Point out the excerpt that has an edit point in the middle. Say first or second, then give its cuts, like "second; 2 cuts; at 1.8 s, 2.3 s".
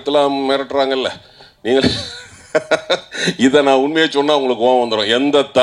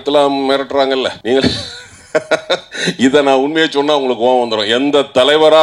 second; 1 cut; at 1.2 s